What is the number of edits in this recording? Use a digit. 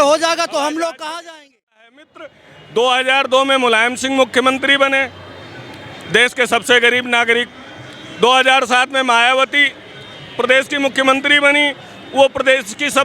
1